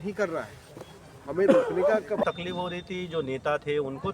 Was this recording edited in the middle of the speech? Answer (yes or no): yes